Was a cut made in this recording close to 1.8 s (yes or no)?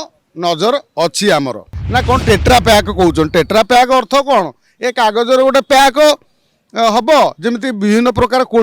yes